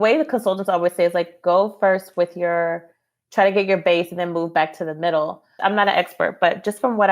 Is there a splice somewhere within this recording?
yes; 1 cut; at 5.5 s

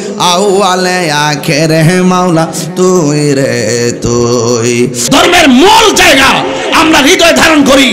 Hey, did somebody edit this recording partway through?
yes; 1 cut; at 5.0 s

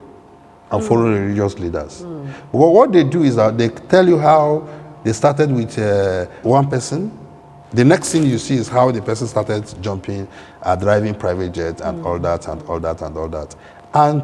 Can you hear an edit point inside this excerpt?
yes; 1 cut; at 6.3 s

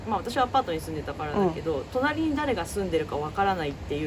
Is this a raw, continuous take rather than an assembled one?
yes; 0 cuts

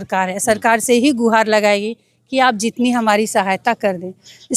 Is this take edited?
no; 0 cuts

